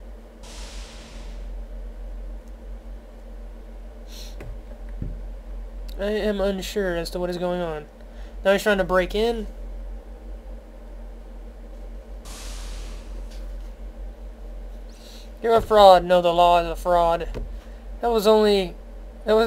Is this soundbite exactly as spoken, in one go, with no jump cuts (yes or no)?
yes